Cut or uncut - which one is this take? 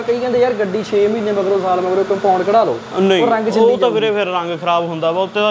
uncut